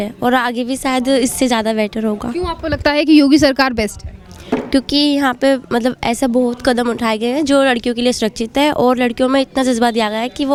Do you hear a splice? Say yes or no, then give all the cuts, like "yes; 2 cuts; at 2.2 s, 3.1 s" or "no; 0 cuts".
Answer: no; 0 cuts